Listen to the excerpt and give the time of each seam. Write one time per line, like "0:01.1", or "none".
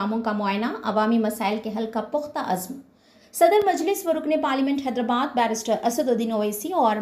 none